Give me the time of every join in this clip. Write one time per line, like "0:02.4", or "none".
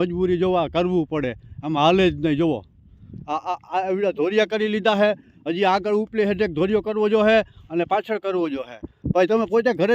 none